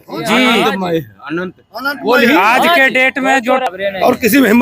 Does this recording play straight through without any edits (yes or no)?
no